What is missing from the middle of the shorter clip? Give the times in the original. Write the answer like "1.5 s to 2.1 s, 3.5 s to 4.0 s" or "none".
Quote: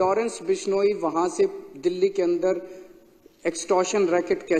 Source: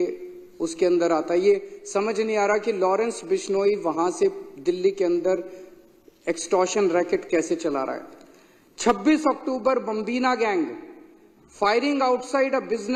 none